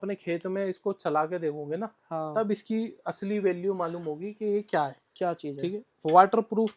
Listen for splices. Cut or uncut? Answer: uncut